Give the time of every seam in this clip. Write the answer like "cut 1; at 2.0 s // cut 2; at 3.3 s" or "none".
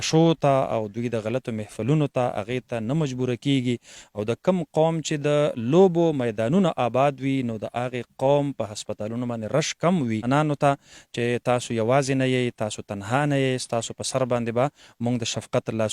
cut 1; at 10.2 s